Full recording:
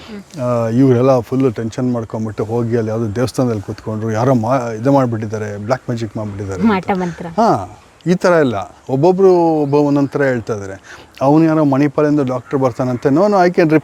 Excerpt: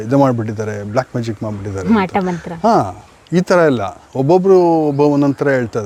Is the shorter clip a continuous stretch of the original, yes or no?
yes